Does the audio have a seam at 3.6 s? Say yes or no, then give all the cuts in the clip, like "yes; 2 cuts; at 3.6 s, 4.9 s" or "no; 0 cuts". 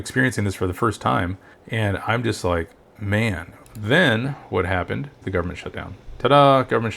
yes; 1 cut; at 3.6 s